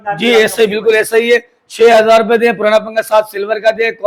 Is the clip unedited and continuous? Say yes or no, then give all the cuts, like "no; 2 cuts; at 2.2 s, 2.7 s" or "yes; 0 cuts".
yes; 0 cuts